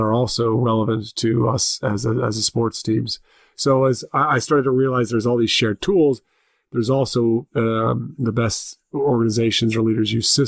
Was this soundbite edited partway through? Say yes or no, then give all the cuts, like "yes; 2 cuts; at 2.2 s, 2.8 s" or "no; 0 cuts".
no; 0 cuts